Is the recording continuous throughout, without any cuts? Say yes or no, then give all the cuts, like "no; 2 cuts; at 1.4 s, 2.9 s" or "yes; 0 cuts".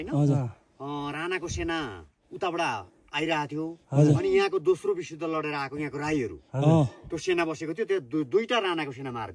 yes; 0 cuts